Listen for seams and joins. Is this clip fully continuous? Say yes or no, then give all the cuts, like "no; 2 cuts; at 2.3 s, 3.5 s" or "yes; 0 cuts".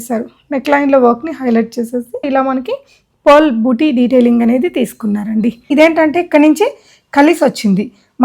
no; 2 cuts; at 2.2 s, 5.7 s